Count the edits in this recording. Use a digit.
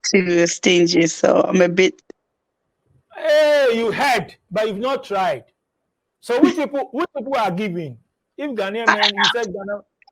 0